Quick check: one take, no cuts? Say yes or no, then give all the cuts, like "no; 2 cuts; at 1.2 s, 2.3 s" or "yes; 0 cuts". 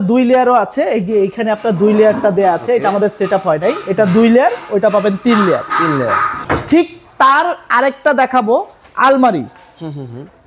no; 1 cut; at 6.3 s